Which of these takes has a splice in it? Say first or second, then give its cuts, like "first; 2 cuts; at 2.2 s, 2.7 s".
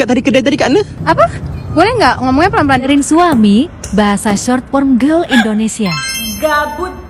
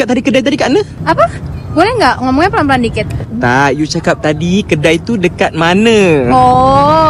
first; 1 cut; at 2.9 s